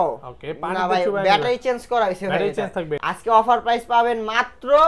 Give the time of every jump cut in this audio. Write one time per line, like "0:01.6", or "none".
0:03.0